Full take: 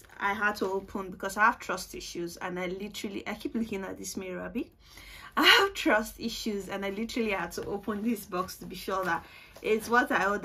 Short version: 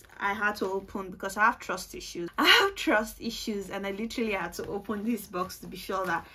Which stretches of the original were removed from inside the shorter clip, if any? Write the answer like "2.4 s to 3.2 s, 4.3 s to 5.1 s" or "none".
2.3 s to 5.3 s

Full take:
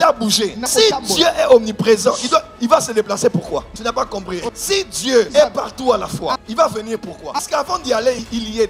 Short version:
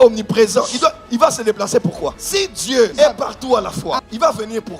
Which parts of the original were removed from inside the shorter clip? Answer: 3.7 s to 4.6 s

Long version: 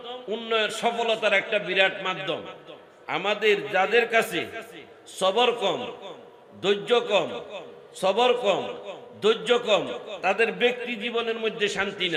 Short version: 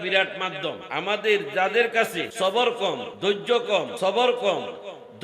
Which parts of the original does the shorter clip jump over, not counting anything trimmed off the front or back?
2.5 s to 3.0 s, 4.4 s to 5.0 s, 5.9 s to 6.5 s, 7.3 s to 7.9 s

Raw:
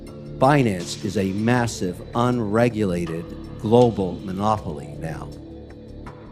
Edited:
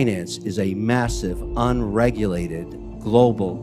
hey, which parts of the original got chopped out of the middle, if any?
none

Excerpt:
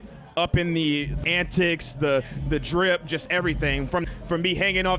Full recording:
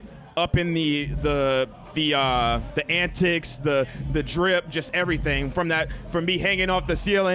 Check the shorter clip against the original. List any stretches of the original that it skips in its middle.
1.2 s to 2.8 s, 5.7 s to 5.9 s

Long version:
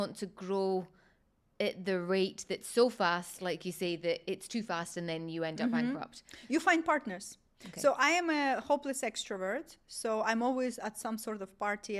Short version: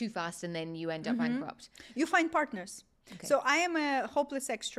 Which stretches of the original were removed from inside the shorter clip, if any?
none

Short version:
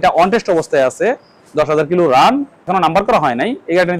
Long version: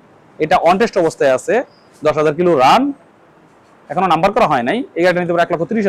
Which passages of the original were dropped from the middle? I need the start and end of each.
3.0 s to 3.8 s

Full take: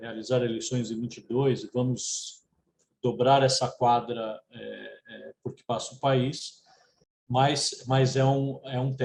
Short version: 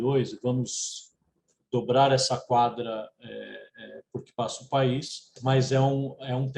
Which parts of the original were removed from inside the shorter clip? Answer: 6.6 s to 7.7 s

